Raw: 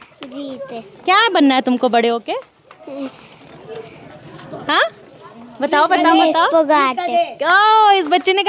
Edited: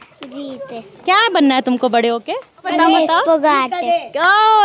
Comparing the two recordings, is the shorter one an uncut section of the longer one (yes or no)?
no